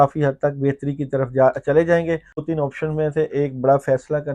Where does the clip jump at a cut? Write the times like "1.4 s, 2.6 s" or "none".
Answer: 2.3 s